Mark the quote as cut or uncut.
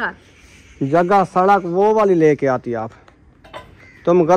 uncut